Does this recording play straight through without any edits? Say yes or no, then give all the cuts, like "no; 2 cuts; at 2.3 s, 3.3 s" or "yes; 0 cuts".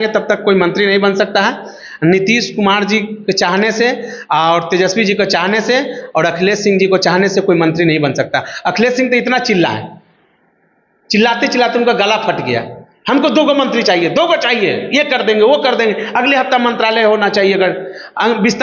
yes; 0 cuts